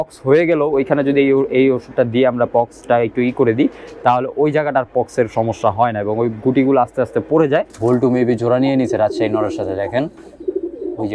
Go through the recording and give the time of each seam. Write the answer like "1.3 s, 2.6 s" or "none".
7.7 s